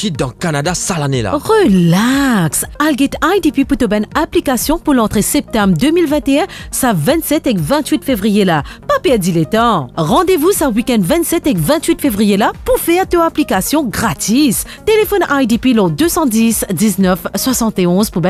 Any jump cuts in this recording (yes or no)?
no